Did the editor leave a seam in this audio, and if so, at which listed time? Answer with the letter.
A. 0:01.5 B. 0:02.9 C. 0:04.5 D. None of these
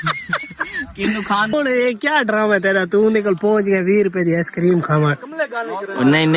A